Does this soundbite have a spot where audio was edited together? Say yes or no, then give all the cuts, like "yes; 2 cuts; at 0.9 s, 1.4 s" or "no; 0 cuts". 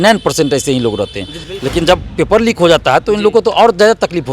yes; 1 cut; at 1.4 s